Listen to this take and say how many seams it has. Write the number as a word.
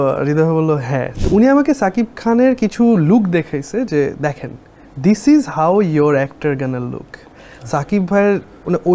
one